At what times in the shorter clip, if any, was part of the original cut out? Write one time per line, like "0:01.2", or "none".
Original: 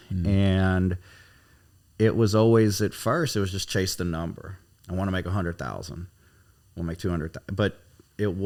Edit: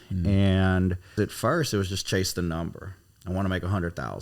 0:01.1